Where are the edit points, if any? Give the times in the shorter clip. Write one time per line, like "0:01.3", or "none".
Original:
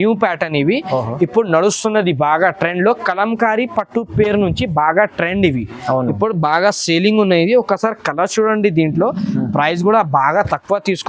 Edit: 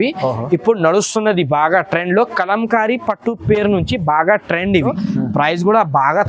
0:04.9

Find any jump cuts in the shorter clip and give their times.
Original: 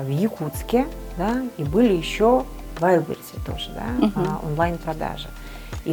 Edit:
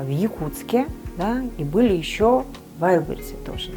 none

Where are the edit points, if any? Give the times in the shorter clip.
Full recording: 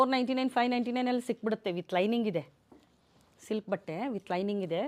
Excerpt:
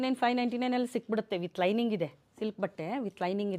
0:02.2

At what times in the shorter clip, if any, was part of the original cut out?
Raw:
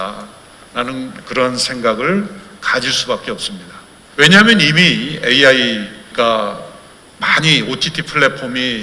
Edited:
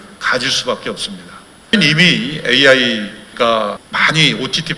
0:01.7
0:03.9

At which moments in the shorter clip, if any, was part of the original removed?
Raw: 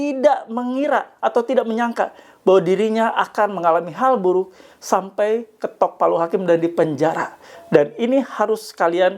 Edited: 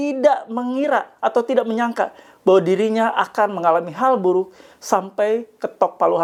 none

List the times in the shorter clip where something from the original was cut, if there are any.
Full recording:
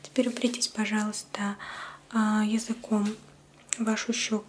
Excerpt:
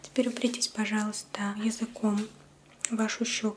0:01.6

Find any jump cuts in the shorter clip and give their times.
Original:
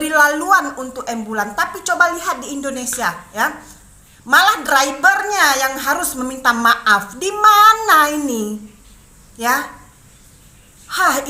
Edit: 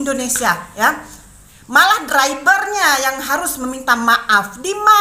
none

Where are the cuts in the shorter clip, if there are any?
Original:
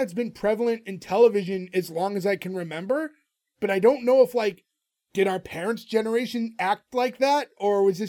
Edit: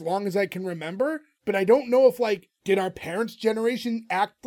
0:01.3
0:02.5

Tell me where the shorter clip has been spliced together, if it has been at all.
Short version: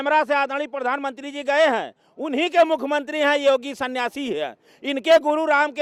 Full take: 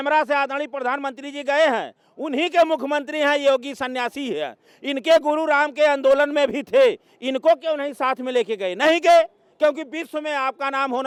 none

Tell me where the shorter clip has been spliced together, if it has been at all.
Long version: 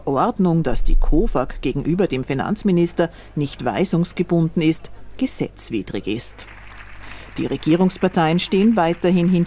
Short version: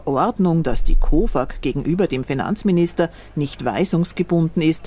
none

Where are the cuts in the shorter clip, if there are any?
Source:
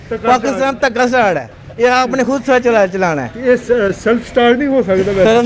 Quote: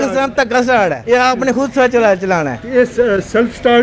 0:01.0

